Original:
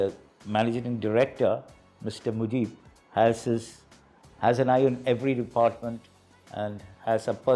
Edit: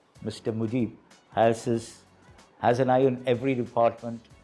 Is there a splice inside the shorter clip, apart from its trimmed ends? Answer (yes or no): no